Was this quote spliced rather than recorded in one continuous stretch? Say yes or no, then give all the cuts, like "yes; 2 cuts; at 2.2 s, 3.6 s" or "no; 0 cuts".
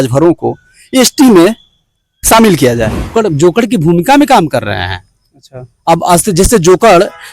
yes; 1 cut; at 3.1 s